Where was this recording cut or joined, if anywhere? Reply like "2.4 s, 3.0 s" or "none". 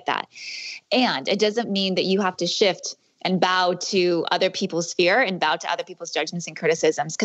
none